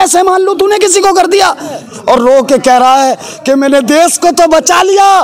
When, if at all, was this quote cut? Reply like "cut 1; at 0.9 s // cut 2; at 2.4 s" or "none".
cut 1; at 1.8 s